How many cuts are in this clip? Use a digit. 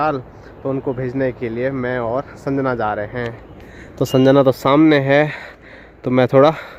0